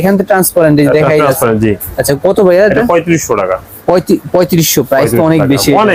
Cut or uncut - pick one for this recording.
uncut